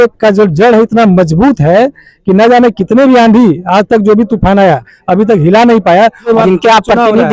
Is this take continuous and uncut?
no; 1 cut; at 6.3 s

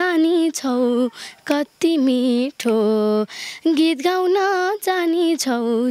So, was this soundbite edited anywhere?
no; 0 cuts

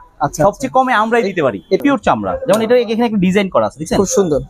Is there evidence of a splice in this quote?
yes; 1 cut; at 1.8 s

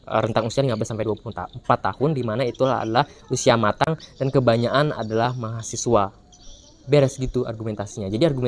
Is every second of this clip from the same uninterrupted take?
yes; 0 cuts

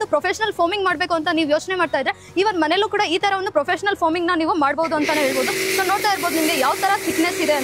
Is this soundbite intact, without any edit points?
yes; 0 cuts

